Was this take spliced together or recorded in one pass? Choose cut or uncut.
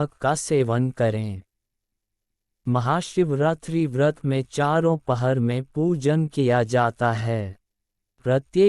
cut